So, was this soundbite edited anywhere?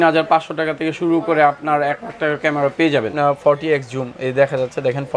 yes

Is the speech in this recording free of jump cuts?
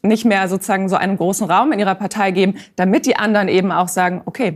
yes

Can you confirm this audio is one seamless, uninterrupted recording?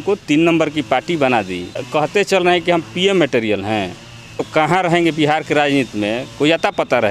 no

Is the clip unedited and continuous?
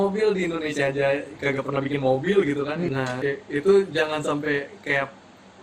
no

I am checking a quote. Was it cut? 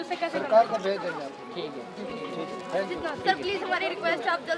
no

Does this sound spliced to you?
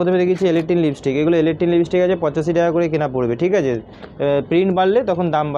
no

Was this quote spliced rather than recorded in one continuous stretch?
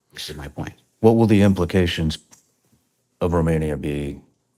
no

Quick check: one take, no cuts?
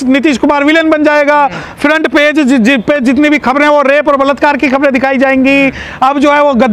yes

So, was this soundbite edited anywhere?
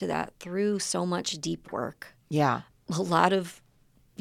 yes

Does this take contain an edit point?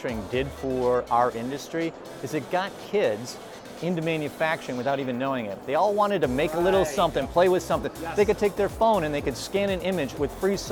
no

